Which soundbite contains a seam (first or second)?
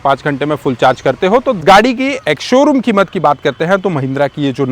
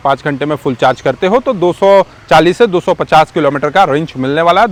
first